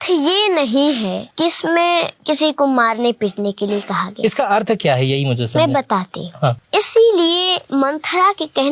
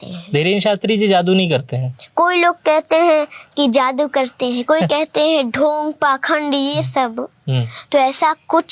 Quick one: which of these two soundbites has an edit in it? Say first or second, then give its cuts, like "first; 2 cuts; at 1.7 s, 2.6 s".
first; 4 cuts; at 1.2 s, 2.1 s, 6.6 s, 7.6 s